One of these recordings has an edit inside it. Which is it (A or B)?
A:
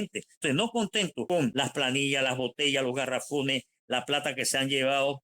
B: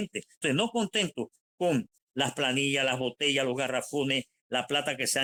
A